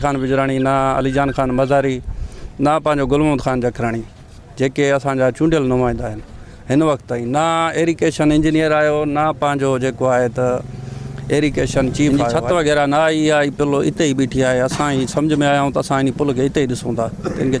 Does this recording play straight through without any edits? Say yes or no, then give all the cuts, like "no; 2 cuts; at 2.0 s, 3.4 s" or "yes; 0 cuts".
no; 1 cut; at 12.1 s